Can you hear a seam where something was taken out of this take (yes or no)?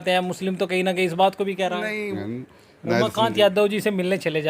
yes